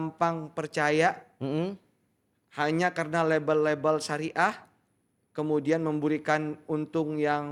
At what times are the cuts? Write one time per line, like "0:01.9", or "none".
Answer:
none